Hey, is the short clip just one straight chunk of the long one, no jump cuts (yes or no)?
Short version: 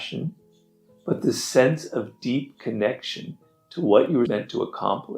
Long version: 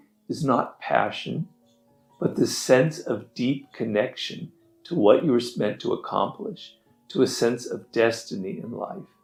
no